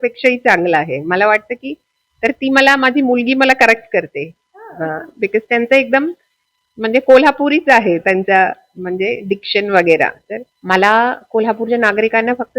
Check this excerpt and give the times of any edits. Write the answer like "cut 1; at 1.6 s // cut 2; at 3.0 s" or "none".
cut 1; at 10.6 s